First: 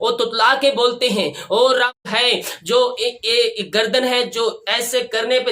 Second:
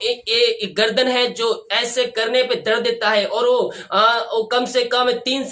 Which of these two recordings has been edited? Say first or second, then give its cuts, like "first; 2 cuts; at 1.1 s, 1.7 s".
first; 1 cut; at 2.0 s